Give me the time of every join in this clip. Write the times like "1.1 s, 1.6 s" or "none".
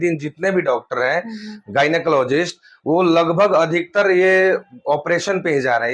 none

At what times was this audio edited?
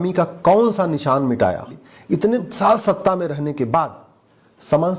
1.9 s

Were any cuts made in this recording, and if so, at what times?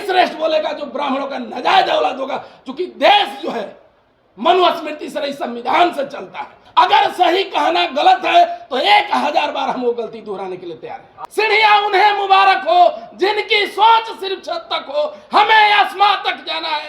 6.6 s, 11.1 s

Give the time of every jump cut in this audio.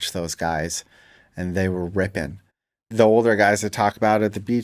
2.9 s

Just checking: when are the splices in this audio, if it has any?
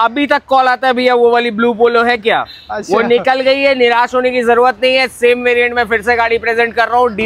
none

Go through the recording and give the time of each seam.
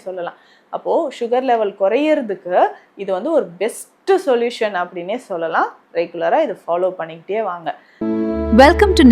7.9 s

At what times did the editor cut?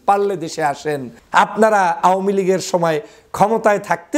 1.1 s

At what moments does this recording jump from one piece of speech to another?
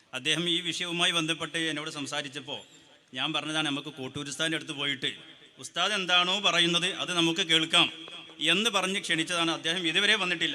none

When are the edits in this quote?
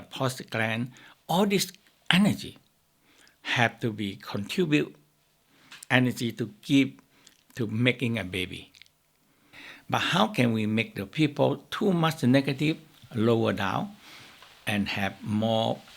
9.7 s

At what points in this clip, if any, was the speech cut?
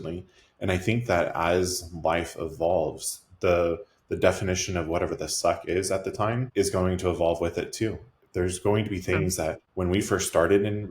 6.5 s, 9.7 s

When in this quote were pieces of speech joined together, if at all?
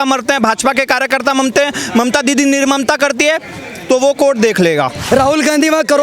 5.0 s

